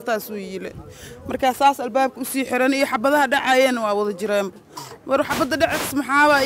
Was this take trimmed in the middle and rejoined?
no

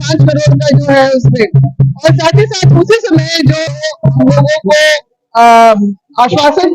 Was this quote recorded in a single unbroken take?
no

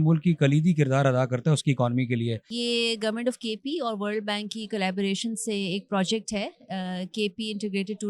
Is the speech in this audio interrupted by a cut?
yes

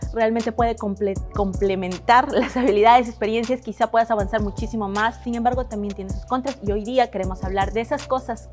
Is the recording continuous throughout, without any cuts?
no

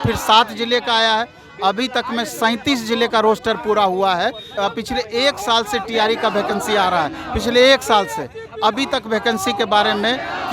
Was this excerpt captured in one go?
no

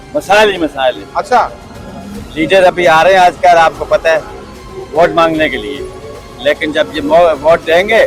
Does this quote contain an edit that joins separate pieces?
no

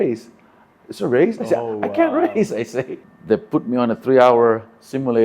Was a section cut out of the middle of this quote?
yes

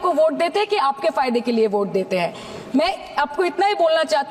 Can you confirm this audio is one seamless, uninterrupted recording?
yes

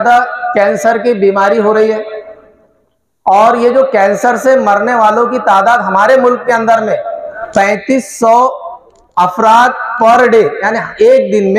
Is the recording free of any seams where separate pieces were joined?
no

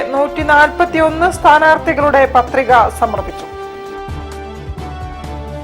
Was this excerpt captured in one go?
yes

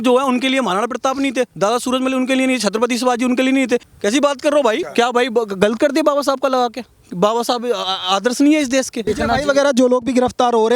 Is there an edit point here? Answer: yes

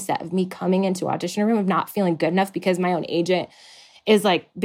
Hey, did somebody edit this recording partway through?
no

